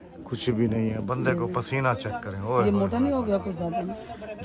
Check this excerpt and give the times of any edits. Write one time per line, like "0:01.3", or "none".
none